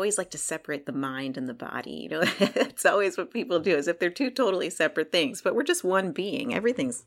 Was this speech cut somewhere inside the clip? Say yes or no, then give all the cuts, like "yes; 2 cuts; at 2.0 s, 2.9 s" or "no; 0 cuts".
no; 0 cuts